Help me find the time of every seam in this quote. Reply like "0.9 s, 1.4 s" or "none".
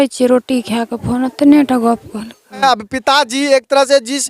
2.6 s